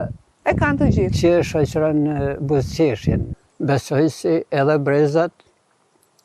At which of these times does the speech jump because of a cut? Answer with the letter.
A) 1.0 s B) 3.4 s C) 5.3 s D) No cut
B